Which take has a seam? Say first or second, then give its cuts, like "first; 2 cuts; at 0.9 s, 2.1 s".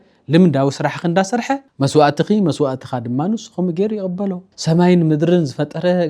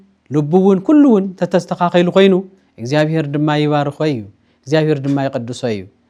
first; 2 cuts; at 1.7 s, 4.5 s